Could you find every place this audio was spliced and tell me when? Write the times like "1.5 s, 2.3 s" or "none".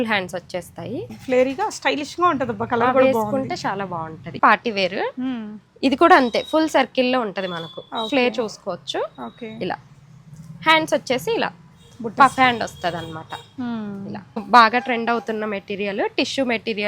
1.1 s, 4.4 s, 14.4 s